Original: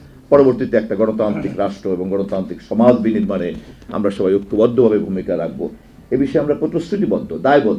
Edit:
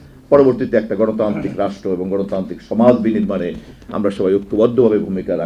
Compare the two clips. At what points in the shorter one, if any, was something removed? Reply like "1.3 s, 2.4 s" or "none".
none

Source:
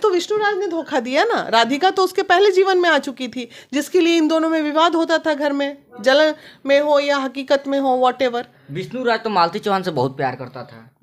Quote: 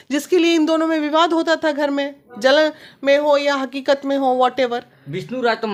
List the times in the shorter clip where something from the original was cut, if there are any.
none

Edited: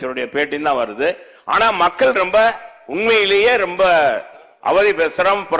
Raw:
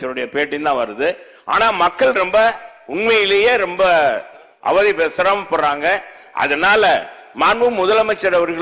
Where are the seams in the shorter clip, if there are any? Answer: none

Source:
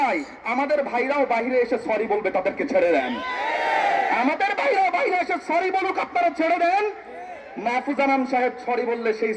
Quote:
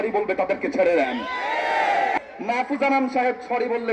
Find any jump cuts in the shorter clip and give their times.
2.2 s

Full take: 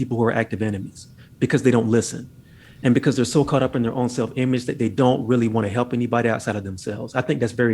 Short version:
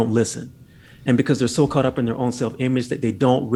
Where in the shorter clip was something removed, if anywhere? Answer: none

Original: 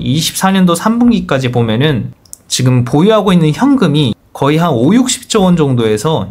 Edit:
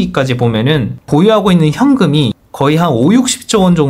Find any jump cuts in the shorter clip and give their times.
1.0 s

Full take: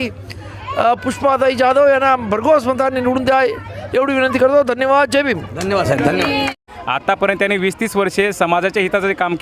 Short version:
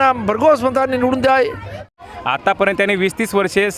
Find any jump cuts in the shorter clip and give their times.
1.9 s

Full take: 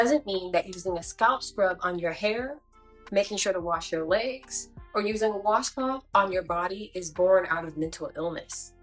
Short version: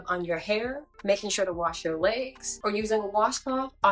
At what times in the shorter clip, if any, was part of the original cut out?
0.9 s, 2.4 s

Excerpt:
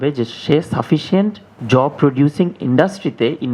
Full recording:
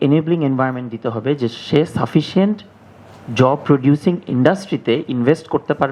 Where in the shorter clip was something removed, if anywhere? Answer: 1.5 s

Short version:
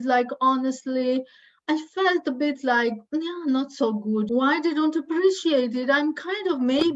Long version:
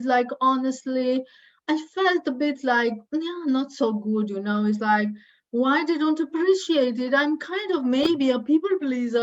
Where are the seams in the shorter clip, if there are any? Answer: 4.3 s

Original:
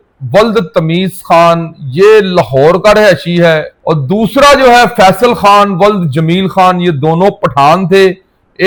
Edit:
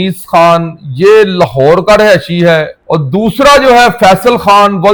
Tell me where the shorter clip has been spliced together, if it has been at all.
none

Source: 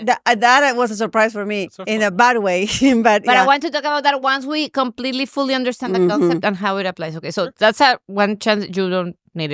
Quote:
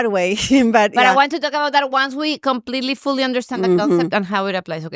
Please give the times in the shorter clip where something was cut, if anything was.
none

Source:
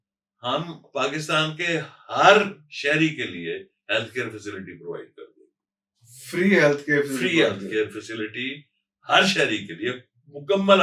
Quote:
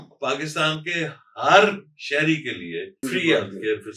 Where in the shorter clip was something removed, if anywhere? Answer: 3.0 s

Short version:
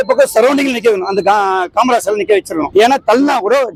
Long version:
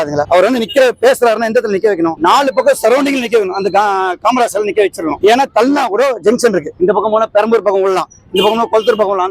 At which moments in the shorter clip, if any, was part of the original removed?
none

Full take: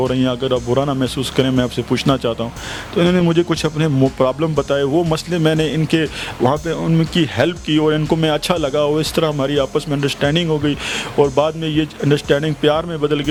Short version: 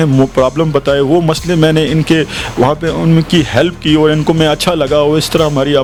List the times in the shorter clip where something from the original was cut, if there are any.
none

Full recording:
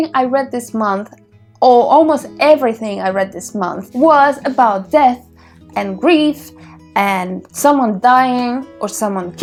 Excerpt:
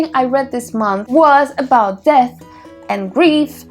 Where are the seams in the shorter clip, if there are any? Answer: 1.0 s

